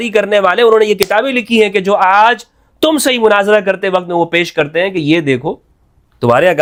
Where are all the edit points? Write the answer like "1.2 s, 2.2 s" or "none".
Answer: none